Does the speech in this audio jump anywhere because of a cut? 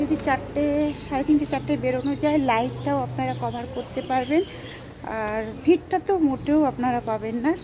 no; 0 cuts

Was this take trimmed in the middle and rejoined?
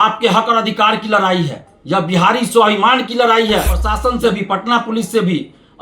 yes; 1 cut; at 3.8 s

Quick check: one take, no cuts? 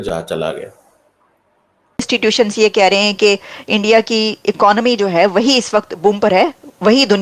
no; 1 cut; at 2.1 s

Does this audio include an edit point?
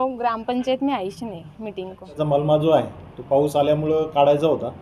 yes; 1 cut; at 2.2 s

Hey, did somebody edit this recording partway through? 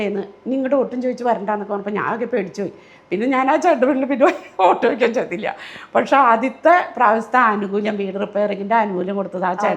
no; 0 cuts

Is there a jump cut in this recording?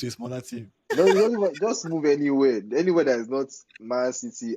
yes; 1 cut; at 0.9 s

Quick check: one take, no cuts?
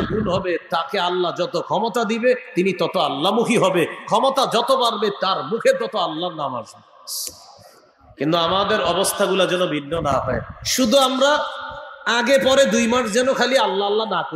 yes; 0 cuts

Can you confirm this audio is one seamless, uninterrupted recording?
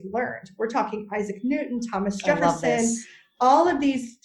yes; 0 cuts

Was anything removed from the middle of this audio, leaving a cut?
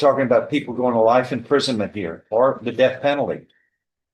no; 0 cuts

